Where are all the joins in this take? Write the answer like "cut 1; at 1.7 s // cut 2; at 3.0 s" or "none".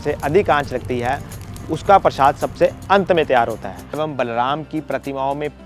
cut 1; at 4.0 s